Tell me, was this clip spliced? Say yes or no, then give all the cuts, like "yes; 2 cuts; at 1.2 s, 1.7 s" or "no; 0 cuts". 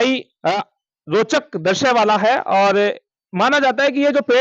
no; 0 cuts